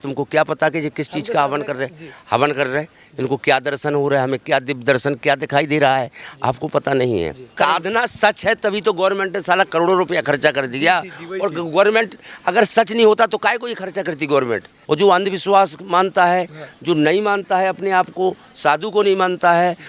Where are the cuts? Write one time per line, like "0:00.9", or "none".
0:07.5
0:14.7